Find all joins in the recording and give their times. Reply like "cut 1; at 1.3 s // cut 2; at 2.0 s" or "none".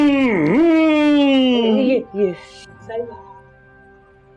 none